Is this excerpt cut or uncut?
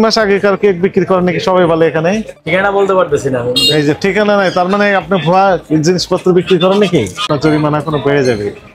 cut